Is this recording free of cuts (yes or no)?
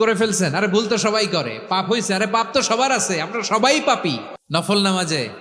no